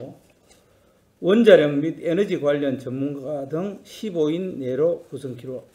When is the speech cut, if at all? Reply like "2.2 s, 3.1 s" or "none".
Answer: 3.9 s